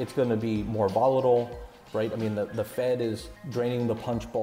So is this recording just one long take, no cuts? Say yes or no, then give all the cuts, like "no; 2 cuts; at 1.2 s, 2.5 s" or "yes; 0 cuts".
no; 2 cuts; at 1.8 s, 3.3 s